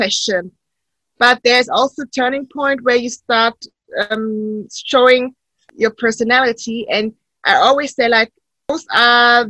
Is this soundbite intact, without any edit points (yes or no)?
no